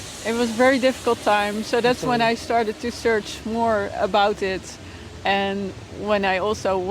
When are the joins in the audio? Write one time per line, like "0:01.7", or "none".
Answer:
none